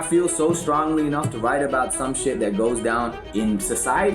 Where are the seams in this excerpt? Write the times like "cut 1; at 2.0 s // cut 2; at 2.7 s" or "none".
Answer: cut 1; at 3.2 s